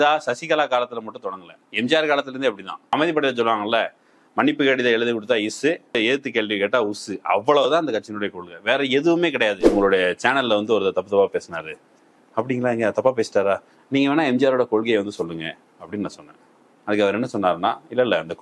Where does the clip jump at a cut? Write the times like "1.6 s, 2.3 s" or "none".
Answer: 2.9 s, 9.6 s